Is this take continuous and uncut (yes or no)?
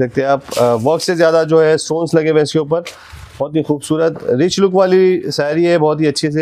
yes